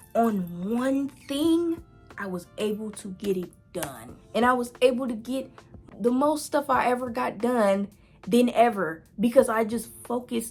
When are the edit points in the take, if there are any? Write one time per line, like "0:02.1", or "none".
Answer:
none